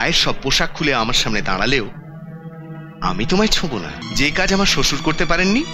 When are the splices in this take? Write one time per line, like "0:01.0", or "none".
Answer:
0:04.0

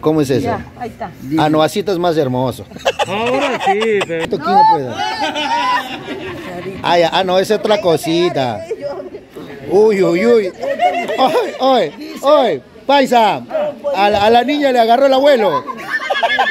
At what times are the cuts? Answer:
0:04.3

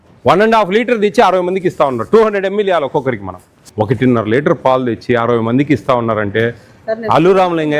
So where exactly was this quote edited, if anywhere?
0:03.5

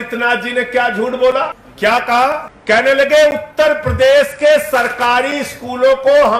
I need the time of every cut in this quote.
0:01.6
0:02.5

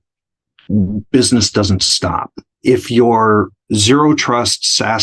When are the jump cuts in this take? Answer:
0:02.5
0:03.6

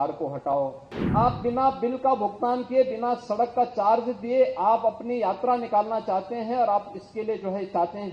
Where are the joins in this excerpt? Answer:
0:00.9

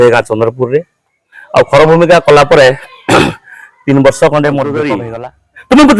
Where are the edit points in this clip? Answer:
0:05.0

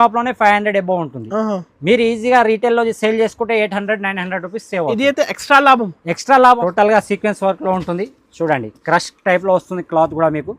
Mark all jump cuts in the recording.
0:06.6

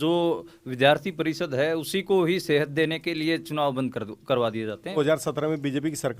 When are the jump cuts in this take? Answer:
0:05.0

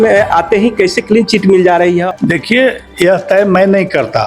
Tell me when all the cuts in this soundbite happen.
0:02.1

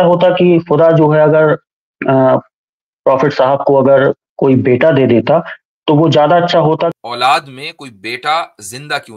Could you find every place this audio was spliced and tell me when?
0:06.9

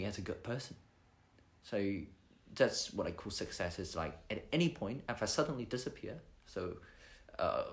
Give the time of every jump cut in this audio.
none

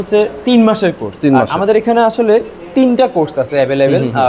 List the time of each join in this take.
none

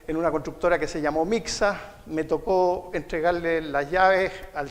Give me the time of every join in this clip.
0:02.1

